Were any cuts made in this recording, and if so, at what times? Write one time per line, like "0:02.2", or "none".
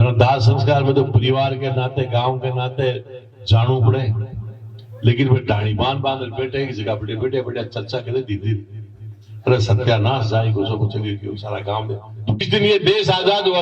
0:12.4